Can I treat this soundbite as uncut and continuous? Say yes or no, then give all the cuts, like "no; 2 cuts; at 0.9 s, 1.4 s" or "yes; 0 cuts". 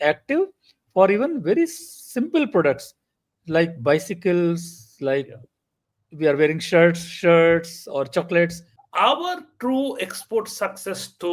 no; 1 cut; at 8.7 s